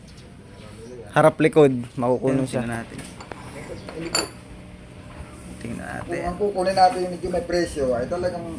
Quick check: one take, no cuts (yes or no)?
no